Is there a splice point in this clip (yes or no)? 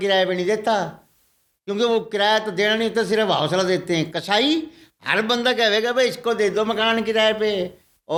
no